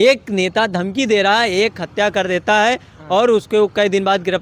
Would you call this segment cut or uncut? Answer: uncut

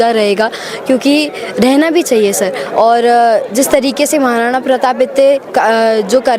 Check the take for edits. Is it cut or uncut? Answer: uncut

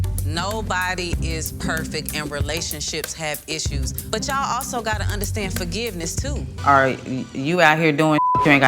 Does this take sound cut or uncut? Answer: cut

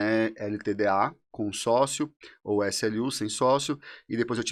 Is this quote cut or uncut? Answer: uncut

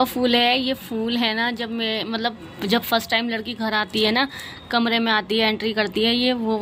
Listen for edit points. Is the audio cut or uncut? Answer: uncut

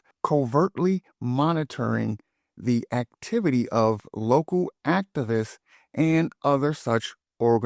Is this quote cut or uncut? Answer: uncut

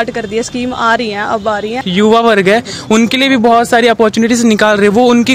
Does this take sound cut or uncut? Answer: cut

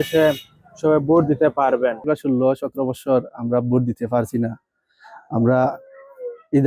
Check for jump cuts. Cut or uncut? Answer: cut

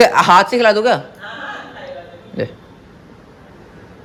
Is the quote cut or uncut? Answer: uncut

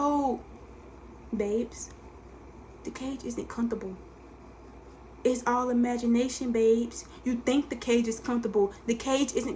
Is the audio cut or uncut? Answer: uncut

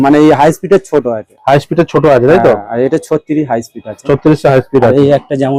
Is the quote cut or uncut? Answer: uncut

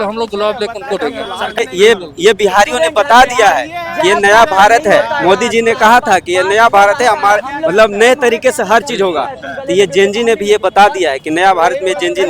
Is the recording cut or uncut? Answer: cut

